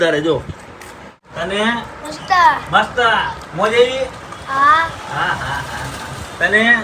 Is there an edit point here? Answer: yes; 1 cut; at 1.2 s

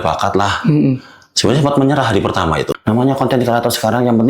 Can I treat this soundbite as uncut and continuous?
no; 1 cut; at 2.7 s

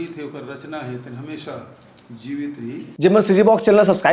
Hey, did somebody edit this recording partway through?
yes; 1 cut; at 3.0 s

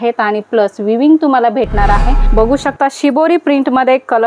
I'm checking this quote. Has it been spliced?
yes; 1 cut; at 2.2 s

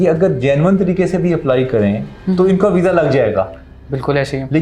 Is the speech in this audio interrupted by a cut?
no; 0 cuts

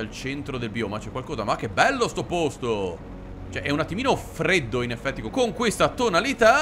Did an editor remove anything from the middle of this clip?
no; 0 cuts

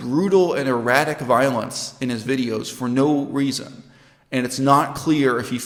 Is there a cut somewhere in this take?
no; 0 cuts

